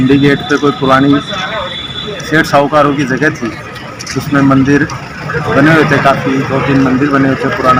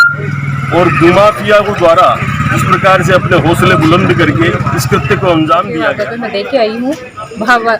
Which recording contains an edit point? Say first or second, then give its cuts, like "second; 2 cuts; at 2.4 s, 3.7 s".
second; 1 cut; at 5.9 s